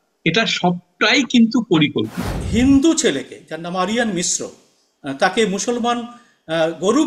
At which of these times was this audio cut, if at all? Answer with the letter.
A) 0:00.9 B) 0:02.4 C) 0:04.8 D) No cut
B